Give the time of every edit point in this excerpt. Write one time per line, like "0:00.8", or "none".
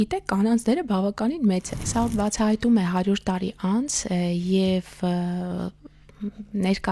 0:01.8